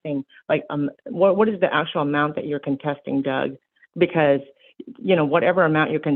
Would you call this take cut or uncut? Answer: uncut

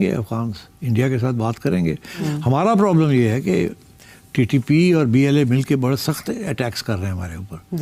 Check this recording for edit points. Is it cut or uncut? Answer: uncut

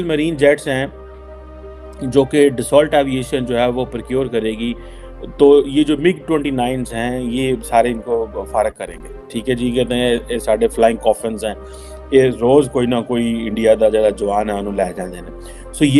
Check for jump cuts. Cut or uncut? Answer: uncut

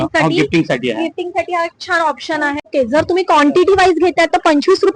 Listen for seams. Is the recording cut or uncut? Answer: cut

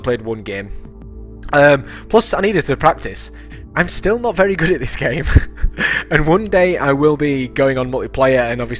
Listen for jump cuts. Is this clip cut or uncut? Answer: cut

